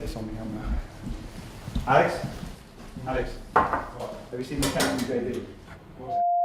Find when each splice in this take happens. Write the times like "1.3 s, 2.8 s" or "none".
none